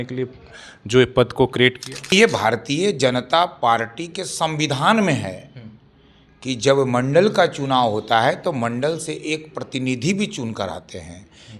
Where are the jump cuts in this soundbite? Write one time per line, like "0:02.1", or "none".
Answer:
0:02.1